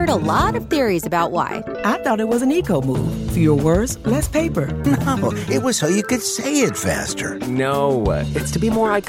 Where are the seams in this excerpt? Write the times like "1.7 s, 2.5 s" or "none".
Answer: none